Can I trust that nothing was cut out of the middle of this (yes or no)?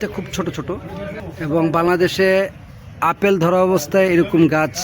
no